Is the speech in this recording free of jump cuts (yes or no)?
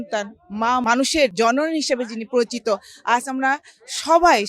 no